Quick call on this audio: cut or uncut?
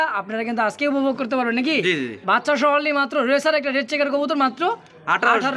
uncut